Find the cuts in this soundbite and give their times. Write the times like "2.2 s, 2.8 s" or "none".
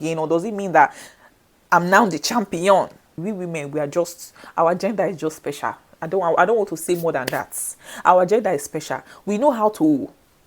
3.1 s